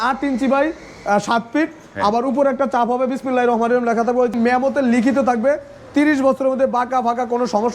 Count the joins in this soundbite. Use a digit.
1